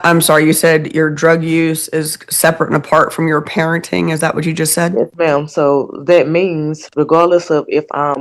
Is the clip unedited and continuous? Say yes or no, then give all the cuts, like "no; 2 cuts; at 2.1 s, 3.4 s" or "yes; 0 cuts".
yes; 0 cuts